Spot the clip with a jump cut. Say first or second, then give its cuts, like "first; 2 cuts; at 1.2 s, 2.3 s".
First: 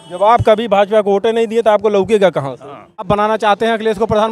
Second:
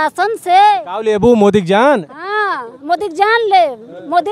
first; 1 cut; at 3.1 s